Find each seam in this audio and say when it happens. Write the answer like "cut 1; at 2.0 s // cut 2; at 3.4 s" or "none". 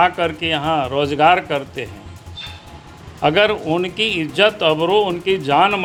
none